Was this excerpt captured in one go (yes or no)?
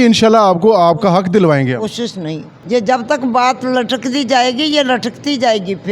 no